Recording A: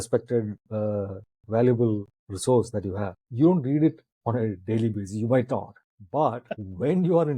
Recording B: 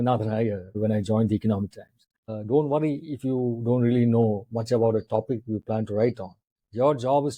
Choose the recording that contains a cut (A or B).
B